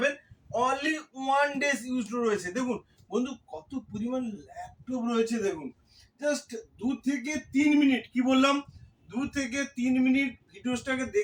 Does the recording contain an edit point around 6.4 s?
no; 0 cuts

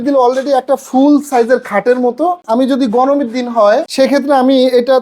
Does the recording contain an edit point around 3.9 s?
yes; 2 cuts; at 2.4 s, 3.9 s

